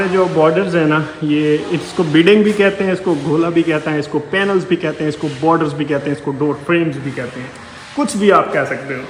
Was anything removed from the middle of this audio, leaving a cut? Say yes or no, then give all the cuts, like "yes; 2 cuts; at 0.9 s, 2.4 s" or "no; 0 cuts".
no; 0 cuts